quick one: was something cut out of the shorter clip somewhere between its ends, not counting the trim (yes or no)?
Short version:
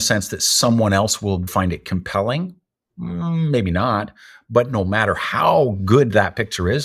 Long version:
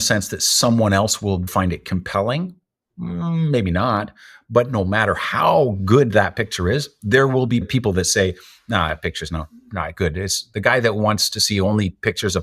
no